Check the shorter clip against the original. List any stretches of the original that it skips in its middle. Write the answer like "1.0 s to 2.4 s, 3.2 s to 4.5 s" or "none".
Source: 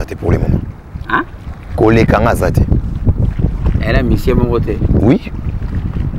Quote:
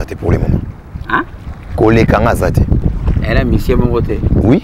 2.9 s to 3.5 s